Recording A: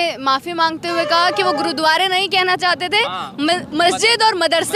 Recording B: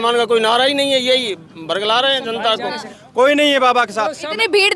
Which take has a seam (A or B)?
B